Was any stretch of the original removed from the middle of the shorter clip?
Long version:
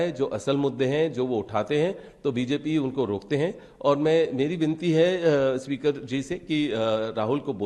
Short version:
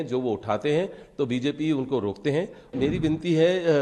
yes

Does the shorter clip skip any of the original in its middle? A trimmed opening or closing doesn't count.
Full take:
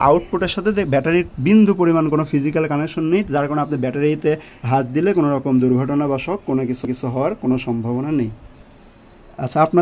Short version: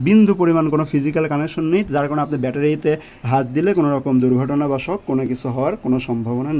yes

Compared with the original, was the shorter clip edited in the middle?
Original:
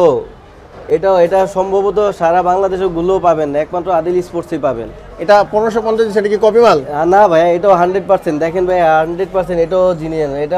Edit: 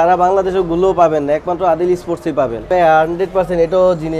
yes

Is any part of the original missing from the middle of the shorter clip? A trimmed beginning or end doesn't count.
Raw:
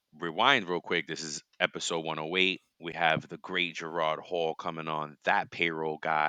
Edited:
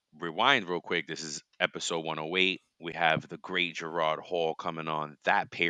no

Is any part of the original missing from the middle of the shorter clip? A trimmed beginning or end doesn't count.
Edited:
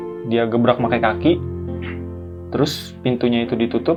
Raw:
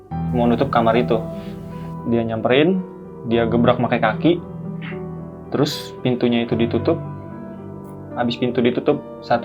no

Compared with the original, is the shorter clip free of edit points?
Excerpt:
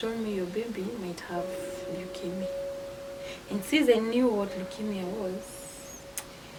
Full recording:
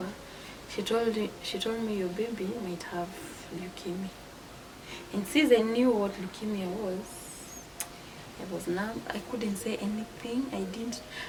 yes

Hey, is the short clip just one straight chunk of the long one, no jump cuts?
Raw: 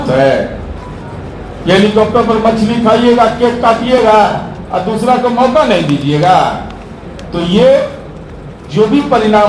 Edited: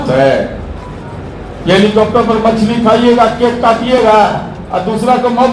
yes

